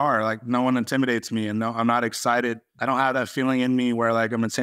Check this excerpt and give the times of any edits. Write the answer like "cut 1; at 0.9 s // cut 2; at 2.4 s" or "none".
cut 1; at 2.7 s